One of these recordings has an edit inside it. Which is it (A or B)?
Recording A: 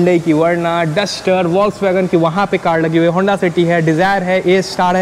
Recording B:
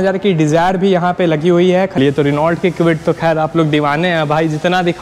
B